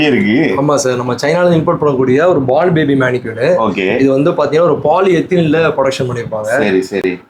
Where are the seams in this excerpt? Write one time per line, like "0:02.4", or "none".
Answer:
none

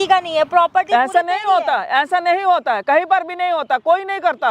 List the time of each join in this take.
none

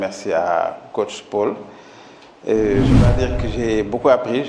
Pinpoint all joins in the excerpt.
none

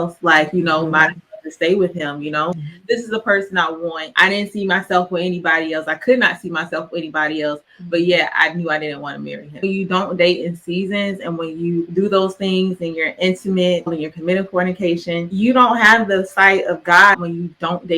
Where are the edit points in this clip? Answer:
0:02.6
0:09.6
0:17.2

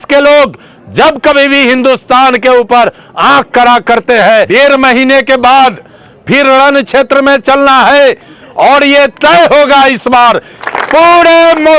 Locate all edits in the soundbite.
0:04.5
0:10.7

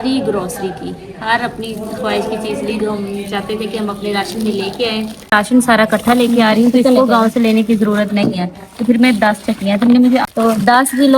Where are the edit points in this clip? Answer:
0:05.3
0:10.2

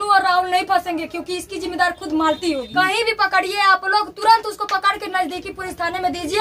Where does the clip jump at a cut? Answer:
0:02.6

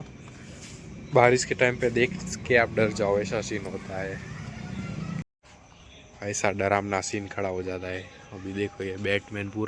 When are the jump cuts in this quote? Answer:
0:05.2

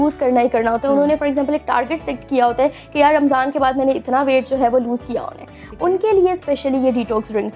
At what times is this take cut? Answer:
none

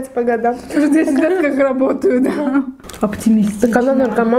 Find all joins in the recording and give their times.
0:02.8

